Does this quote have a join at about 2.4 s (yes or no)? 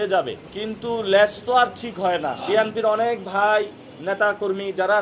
yes